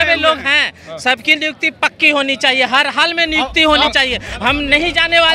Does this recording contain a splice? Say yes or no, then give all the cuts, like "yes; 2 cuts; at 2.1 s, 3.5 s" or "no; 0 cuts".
no; 0 cuts